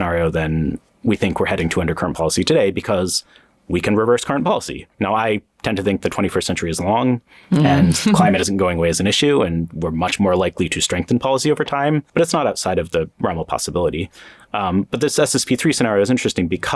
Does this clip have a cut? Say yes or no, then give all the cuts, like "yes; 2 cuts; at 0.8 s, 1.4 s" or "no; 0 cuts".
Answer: yes; 1 cut; at 12.1 s